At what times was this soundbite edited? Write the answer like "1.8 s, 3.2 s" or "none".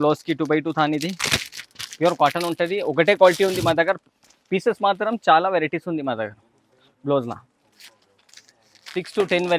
none